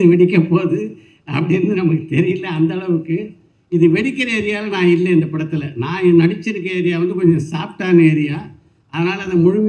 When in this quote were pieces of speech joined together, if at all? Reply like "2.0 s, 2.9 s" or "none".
none